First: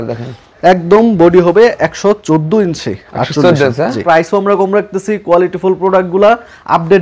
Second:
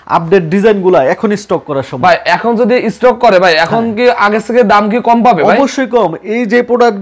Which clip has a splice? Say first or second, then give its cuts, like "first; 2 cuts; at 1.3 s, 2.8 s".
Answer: first; 1 cut; at 4.0 s